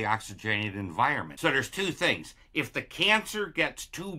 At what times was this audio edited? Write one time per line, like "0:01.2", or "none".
0:01.3